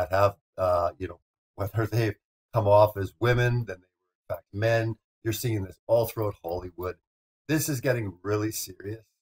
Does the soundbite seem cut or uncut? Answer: uncut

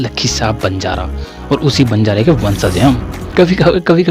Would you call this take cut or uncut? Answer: cut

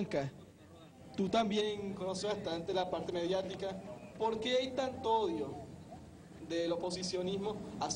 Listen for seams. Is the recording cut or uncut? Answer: uncut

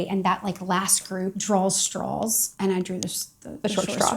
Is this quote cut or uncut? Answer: cut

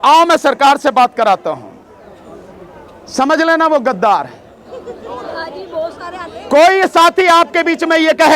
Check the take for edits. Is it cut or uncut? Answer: uncut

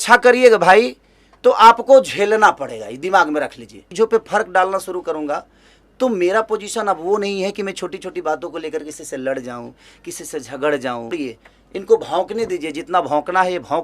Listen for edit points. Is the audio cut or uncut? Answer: cut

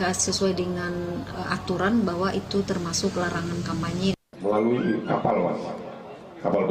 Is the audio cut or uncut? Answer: cut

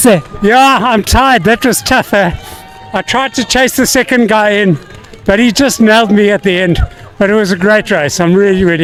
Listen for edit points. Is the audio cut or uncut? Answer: uncut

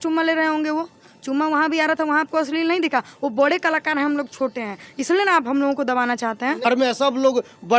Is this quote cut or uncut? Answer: cut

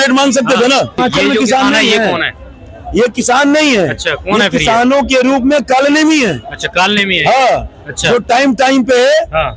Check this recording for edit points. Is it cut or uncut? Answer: cut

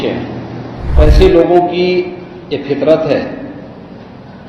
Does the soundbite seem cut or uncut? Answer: cut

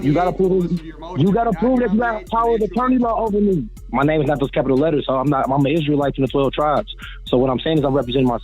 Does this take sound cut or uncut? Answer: cut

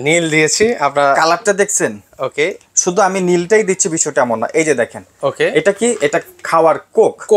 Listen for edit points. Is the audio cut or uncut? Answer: uncut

